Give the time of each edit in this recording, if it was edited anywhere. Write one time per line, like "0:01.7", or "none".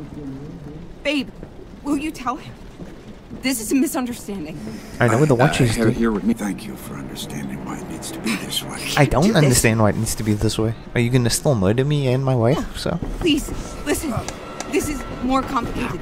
0:06.3